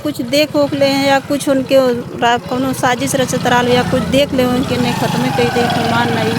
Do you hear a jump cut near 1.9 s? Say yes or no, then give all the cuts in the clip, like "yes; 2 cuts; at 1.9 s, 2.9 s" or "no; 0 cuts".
no; 0 cuts